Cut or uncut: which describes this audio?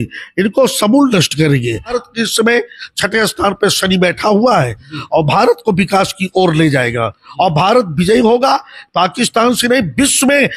cut